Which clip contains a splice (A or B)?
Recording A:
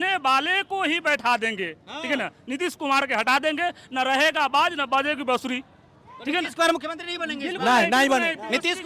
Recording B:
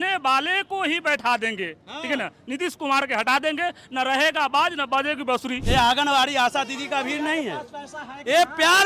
B